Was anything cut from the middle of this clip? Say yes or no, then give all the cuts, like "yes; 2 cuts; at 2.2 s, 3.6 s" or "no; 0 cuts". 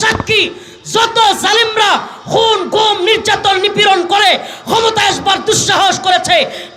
no; 0 cuts